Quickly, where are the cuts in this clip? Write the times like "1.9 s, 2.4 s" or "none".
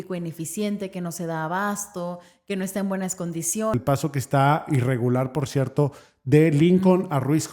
3.7 s